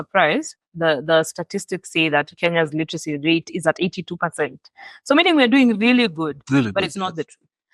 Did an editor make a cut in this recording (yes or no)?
no